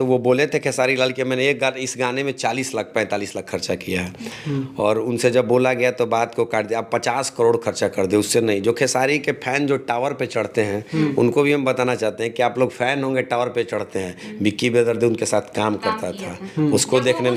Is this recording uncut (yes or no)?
yes